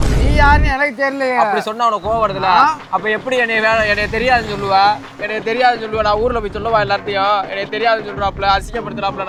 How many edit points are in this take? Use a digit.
0